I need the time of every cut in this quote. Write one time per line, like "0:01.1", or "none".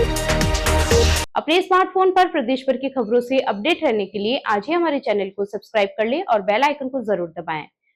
none